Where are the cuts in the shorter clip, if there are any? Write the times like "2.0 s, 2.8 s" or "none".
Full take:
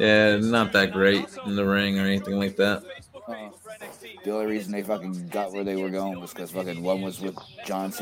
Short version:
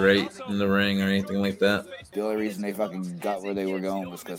2.0 s